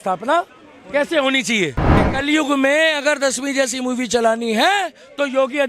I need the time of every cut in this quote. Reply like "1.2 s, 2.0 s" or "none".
2.0 s